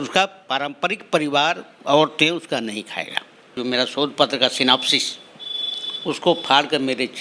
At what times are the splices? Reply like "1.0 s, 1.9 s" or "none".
3.6 s